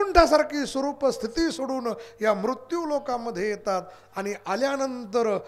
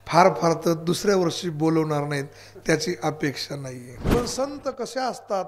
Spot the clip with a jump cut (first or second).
second